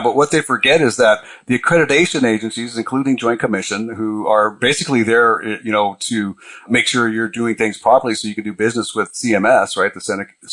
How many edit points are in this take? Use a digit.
2